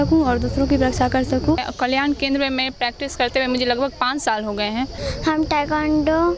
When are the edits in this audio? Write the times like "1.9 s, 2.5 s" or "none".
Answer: 1.7 s, 5.1 s